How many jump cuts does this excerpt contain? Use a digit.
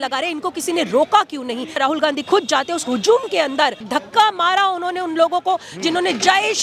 2